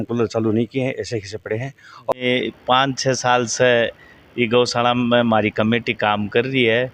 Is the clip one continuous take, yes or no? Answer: no